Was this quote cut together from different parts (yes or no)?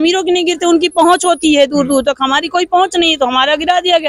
no